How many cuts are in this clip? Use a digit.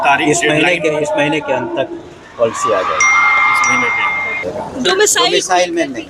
1